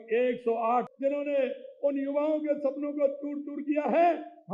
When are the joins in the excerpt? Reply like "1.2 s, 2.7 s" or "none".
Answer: 0.9 s